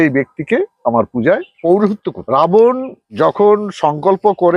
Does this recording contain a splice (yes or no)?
yes